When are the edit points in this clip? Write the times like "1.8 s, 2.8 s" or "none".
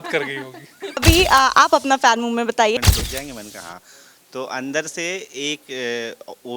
1.0 s, 2.8 s